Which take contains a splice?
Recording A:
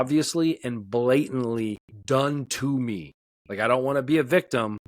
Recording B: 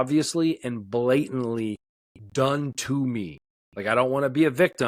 A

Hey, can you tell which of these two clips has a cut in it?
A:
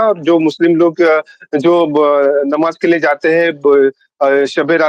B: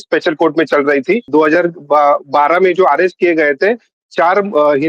B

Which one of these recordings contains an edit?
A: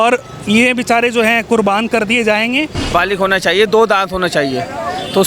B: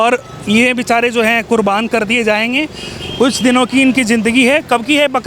A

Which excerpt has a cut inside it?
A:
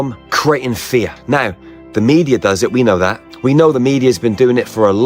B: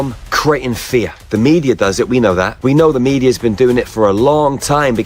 B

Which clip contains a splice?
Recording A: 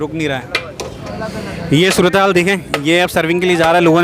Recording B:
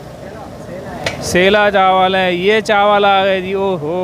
A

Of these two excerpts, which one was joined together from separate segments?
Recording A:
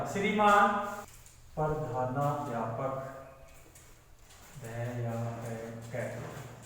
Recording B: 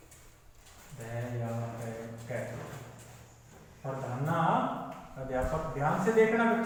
A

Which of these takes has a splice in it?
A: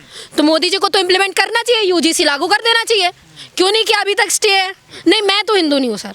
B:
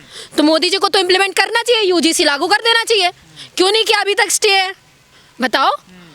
A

